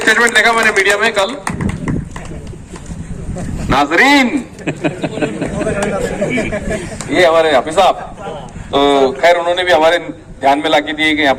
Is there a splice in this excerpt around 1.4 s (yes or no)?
no